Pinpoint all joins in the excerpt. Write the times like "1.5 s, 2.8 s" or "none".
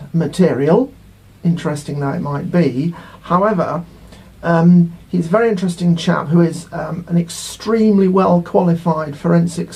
none